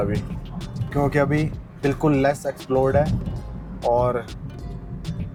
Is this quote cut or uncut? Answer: uncut